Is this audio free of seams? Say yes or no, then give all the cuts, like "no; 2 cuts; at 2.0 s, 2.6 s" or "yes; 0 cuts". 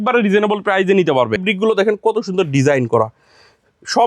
no; 1 cut; at 1.4 s